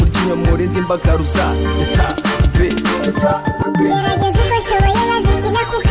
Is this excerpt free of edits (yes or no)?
yes